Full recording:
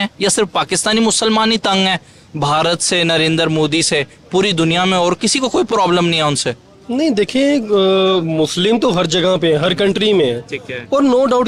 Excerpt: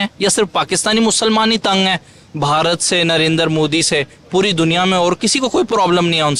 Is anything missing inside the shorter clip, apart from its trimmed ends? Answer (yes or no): no